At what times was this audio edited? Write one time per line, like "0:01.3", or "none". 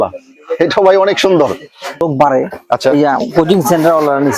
0:02.0